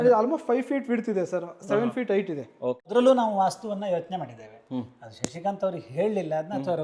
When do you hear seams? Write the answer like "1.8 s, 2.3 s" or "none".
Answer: 2.9 s